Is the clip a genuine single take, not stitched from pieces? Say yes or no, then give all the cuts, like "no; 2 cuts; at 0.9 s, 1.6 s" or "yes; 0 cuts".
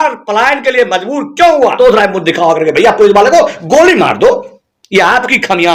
no; 1 cut; at 1.8 s